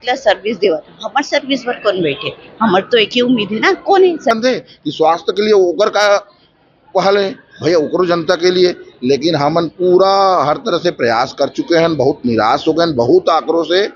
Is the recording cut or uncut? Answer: cut